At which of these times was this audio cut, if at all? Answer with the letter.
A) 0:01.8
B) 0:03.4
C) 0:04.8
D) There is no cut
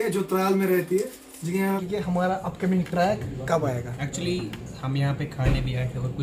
A